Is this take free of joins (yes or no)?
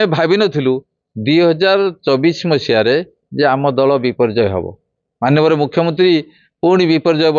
yes